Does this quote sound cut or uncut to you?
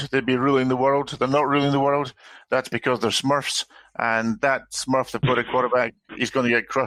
uncut